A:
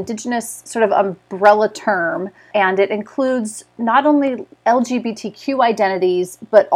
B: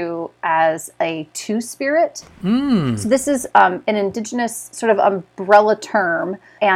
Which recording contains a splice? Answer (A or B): B